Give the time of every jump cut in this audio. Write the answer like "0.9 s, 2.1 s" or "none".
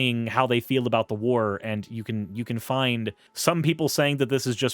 3.2 s